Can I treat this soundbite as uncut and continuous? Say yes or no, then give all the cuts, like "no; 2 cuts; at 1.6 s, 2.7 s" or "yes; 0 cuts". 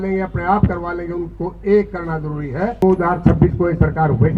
no; 1 cut; at 2.7 s